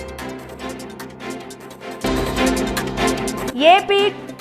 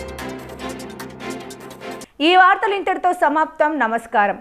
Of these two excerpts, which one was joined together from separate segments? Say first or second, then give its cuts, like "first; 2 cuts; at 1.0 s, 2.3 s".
first; 2 cuts; at 2.0 s, 3.5 s